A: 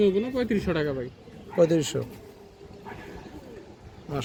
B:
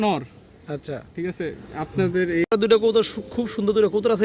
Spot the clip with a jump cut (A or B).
B